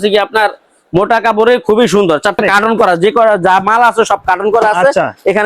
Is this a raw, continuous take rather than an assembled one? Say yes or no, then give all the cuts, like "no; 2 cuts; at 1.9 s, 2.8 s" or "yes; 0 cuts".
no; 1 cut; at 2.4 s